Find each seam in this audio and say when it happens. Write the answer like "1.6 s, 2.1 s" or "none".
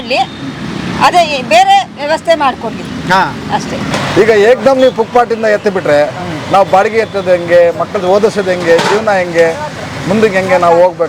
3.9 s